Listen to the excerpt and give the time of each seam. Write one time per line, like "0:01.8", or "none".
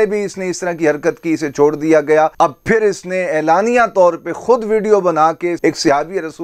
0:02.3
0:05.6